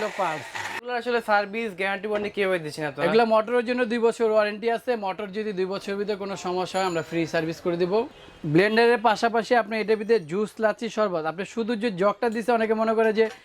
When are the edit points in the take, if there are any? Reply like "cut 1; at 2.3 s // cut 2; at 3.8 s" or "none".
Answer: cut 1; at 1.0 s // cut 2; at 8.1 s

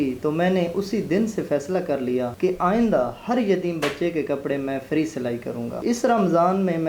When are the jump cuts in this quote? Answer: cut 1; at 2.3 s // cut 2; at 5.8 s

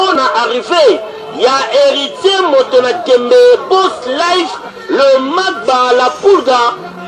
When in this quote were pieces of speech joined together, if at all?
cut 1; at 4.4 s

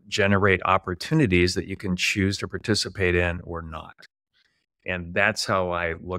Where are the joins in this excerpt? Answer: none

